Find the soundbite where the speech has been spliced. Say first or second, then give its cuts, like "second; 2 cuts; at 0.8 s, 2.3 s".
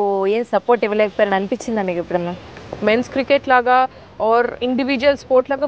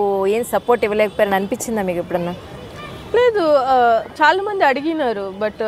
first; 1 cut; at 2.6 s